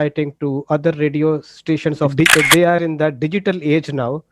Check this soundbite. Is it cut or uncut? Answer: cut